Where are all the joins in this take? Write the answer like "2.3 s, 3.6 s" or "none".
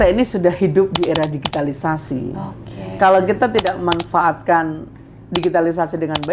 none